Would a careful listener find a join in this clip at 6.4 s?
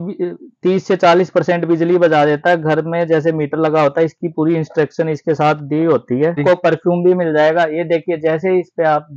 yes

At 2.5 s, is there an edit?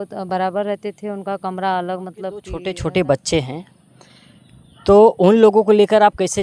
yes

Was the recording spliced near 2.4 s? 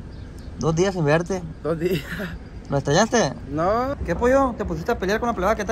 no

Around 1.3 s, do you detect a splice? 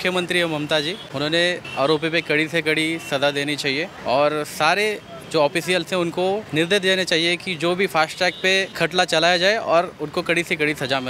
yes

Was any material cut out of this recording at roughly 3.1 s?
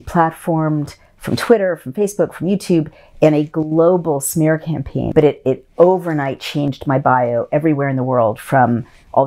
no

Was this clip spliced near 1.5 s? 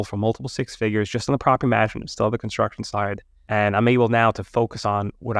no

